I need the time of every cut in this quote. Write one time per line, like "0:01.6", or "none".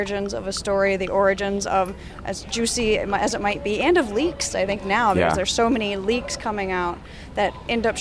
none